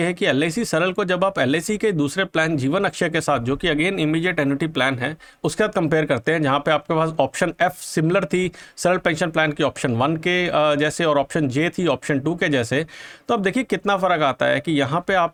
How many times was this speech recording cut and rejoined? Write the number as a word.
zero